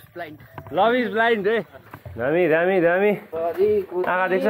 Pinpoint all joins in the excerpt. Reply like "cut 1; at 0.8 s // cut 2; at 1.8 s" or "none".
cut 1; at 2.3 s